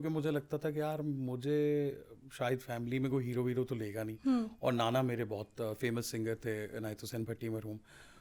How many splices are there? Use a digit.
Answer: 0